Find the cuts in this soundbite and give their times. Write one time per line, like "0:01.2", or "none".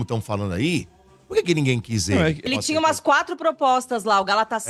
0:02.4